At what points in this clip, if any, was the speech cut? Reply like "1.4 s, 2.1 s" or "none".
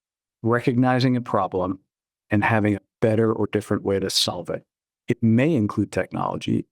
none